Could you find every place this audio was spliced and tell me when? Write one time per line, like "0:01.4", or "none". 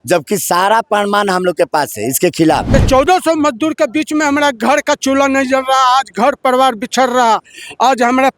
0:02.7